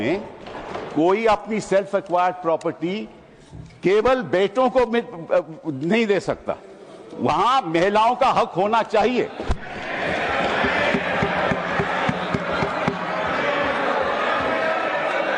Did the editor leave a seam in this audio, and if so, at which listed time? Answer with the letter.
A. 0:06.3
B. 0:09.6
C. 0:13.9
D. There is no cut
D